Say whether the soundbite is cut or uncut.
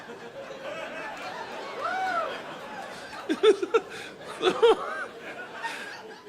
cut